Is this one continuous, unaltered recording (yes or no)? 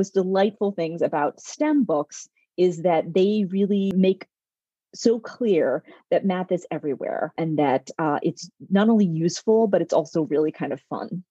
no